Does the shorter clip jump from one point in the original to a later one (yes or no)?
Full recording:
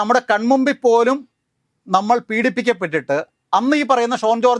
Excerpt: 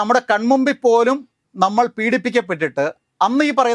yes